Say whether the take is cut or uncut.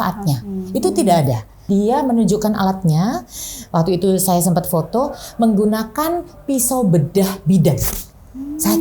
cut